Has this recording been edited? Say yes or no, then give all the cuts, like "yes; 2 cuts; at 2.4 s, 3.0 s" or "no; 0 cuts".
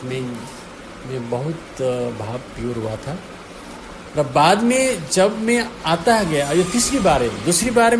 no; 0 cuts